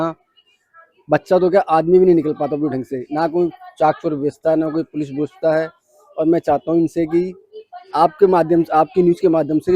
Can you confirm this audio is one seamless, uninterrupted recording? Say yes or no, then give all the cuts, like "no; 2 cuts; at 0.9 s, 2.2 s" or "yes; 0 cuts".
yes; 0 cuts